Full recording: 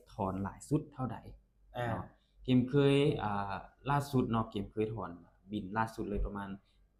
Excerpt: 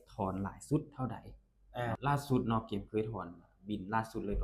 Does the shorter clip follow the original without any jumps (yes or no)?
no